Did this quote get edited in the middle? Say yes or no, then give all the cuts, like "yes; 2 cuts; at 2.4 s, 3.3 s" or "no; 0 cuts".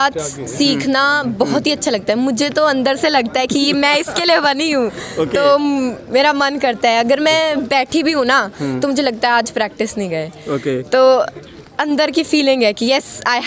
no; 0 cuts